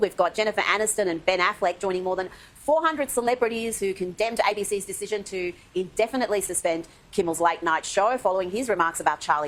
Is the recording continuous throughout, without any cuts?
yes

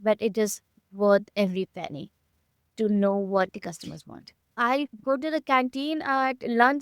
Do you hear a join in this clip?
yes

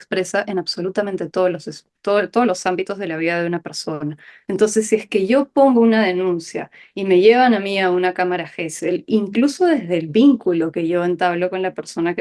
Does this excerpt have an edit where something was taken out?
yes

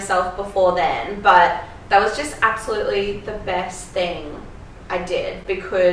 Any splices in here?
no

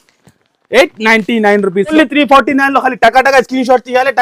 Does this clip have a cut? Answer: yes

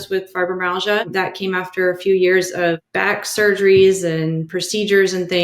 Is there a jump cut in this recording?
yes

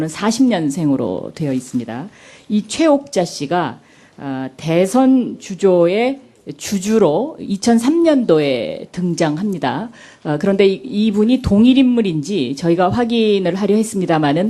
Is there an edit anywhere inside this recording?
yes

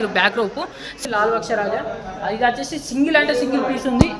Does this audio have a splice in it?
yes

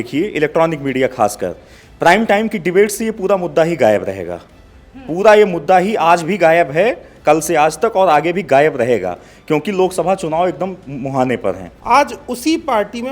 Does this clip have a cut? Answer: yes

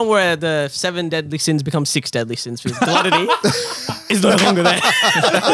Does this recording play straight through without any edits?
yes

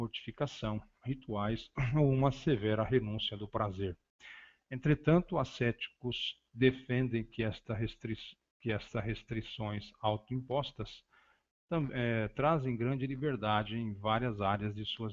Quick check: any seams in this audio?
yes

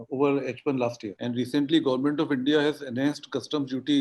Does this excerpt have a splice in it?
yes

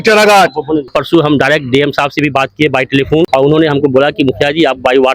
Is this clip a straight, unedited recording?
no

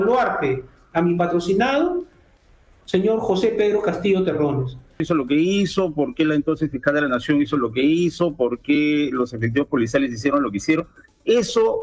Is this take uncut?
no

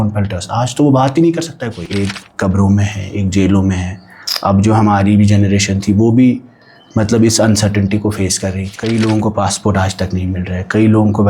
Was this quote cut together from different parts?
yes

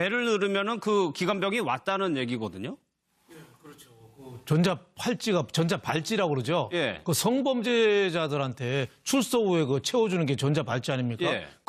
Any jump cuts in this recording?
yes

